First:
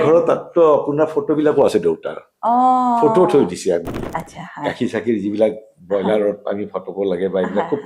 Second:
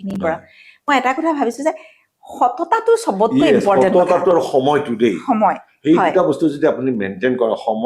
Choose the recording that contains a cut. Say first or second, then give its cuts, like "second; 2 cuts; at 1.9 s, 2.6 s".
first; 1 cut; at 4.0 s